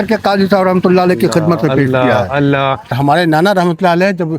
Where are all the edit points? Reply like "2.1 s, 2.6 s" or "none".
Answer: 3.0 s